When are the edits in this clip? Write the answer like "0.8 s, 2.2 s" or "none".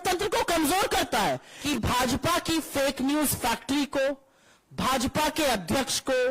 1.5 s